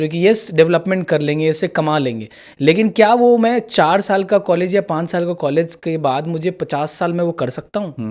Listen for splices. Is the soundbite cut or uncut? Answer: uncut